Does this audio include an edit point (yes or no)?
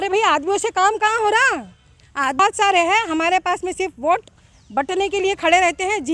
yes